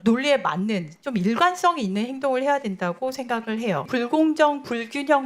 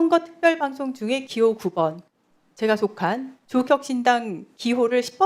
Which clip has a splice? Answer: first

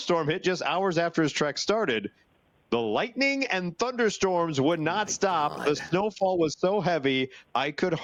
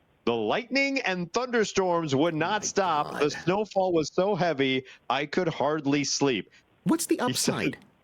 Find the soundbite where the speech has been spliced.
second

